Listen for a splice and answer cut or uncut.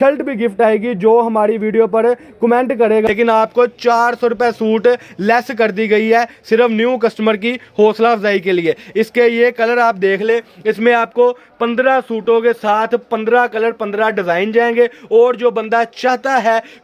cut